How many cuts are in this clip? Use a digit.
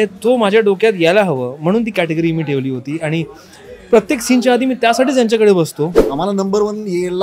1